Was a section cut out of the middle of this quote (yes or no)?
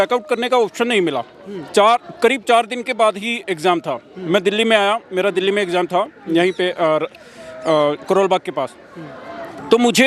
no